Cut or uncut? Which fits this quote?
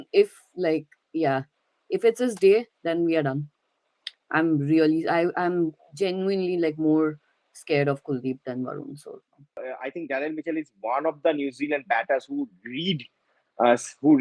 cut